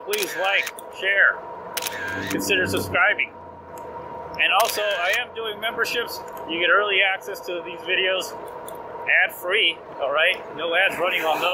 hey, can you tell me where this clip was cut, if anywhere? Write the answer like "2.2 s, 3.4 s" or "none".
none

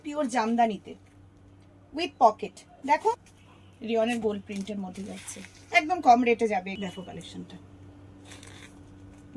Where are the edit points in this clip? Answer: 3.3 s, 6.7 s

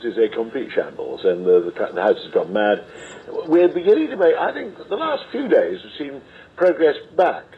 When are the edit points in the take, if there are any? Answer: none

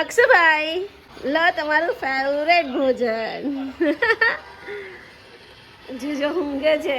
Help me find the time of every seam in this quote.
1.0 s

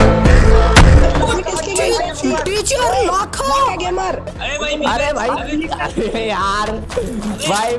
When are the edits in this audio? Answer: 4.4 s

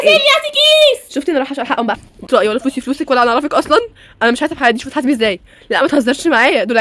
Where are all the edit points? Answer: none

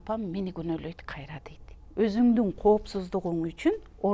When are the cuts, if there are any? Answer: 1.8 s

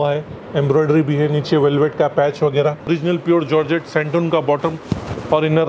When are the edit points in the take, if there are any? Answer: 2.9 s

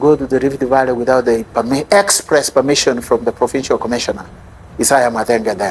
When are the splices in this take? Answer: none

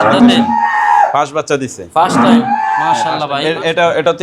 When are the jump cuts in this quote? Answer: 3.2 s

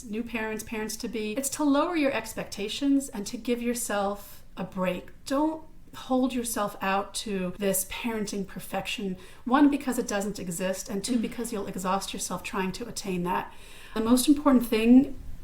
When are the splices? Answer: 1.3 s, 7.5 s, 14.0 s

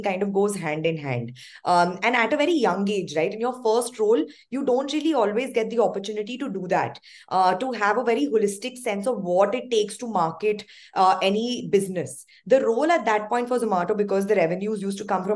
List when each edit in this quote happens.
none

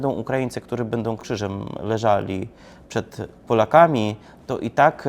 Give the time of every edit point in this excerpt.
1.2 s

